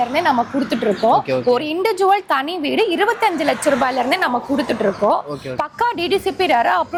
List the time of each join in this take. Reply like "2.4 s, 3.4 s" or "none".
none